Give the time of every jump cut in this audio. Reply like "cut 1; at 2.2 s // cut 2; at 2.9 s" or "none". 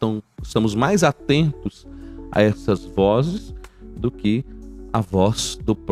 none